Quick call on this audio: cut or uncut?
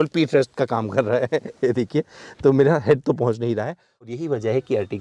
cut